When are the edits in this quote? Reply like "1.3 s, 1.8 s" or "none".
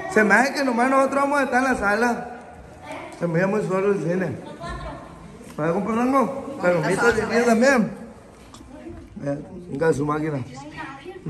none

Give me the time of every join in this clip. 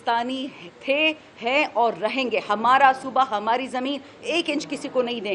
none

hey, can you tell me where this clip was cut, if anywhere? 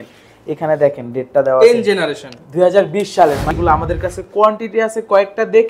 3.5 s

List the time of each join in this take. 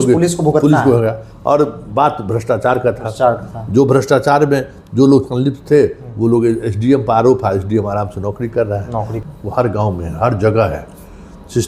9.1 s

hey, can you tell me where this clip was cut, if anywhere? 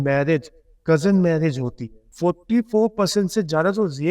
2.1 s

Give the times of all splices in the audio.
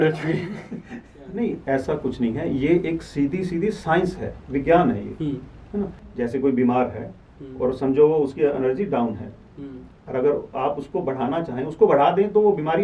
1.2 s, 6.0 s

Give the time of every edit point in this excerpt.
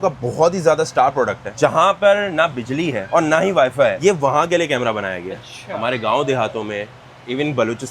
none

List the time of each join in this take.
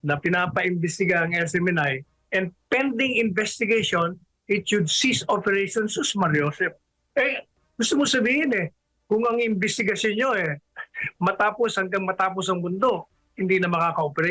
none

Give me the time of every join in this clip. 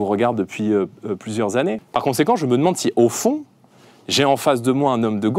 1.8 s

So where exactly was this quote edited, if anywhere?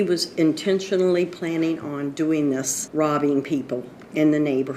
2.8 s

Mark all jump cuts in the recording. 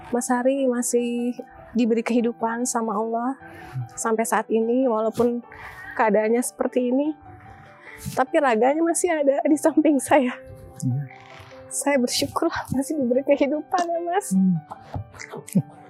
none

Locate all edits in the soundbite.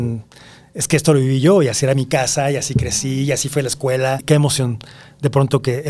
4.2 s

